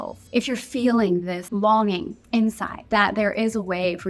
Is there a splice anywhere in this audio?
yes; 1 cut; at 1.4 s

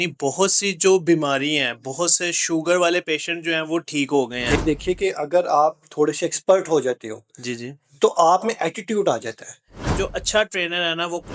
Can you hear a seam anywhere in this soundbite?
yes; 2 cuts; at 4.6 s, 9.9 s

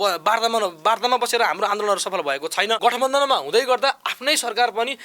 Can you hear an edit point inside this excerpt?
yes; 1 cut; at 2.8 s

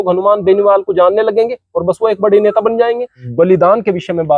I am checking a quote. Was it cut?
yes; 1 cut; at 3.2 s

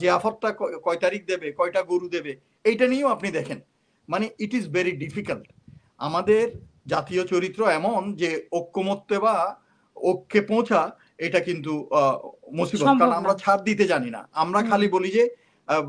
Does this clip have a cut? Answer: no; 0 cuts

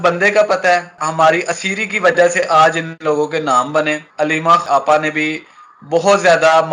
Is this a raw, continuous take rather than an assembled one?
no; 2 cuts; at 1.0 s, 4.6 s

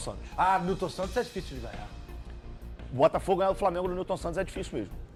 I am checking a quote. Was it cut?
no; 0 cuts

